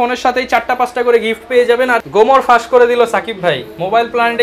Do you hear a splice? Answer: yes; 1 cut; at 1.9 s

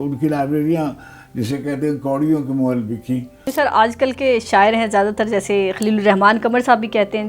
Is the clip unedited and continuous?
no; 1 cut; at 3.4 s

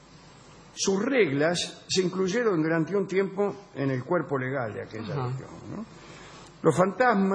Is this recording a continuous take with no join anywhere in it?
yes; 0 cuts

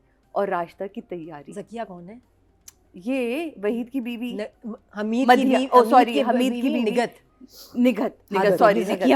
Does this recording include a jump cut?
no; 0 cuts

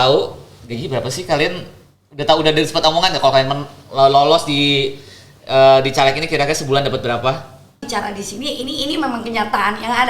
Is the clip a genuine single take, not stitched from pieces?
no; 1 cut; at 7.9 s

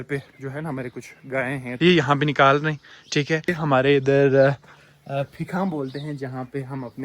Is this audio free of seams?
no; 2 cuts; at 1.7 s, 3.5 s

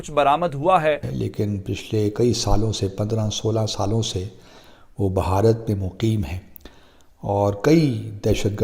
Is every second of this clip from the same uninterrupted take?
no; 1 cut; at 1.0 s

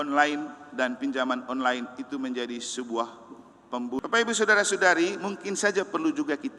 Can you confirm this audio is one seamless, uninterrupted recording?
no; 1 cut; at 4.0 s

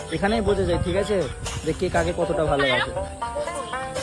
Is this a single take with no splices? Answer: yes; 0 cuts

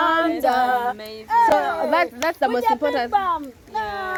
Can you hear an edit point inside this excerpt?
no; 0 cuts

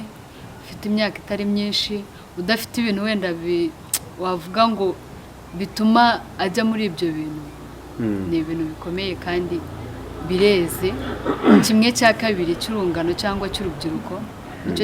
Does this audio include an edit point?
no; 0 cuts

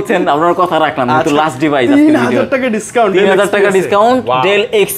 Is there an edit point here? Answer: no; 0 cuts

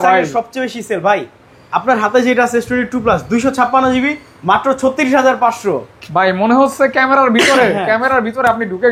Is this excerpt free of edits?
yes; 0 cuts

